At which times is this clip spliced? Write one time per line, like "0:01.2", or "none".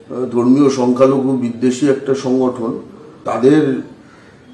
0:03.2